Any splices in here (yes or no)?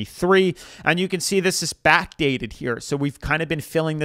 no